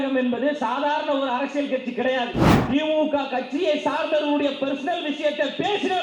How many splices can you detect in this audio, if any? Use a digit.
1